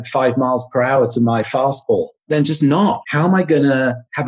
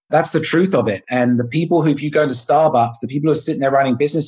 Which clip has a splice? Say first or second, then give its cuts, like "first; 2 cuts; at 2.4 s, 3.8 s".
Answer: first; 2 cuts; at 2.2 s, 3.0 s